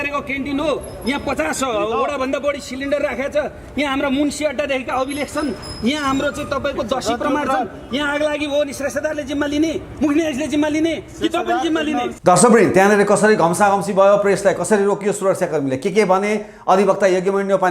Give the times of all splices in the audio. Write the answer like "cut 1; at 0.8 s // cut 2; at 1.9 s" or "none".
none